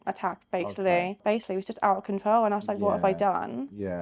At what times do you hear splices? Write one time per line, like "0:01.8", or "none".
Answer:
0:01.2